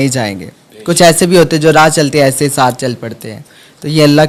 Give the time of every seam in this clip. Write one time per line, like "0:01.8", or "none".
none